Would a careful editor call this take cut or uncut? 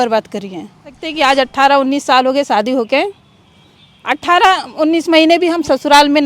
cut